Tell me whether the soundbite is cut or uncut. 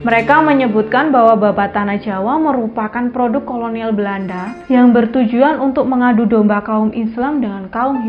cut